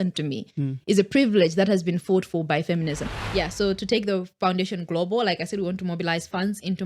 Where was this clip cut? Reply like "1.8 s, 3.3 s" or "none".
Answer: 3.1 s

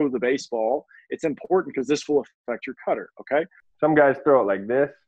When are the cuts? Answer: 3.6 s

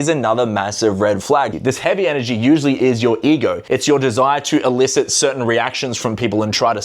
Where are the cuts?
1.5 s, 3.6 s

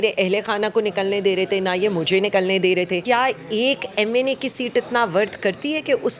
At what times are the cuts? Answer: 3.0 s

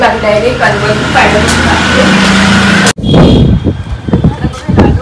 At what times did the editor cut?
2.9 s

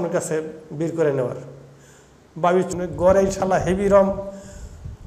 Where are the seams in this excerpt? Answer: 2.7 s

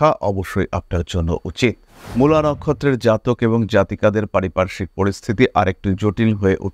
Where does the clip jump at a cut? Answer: 2.0 s

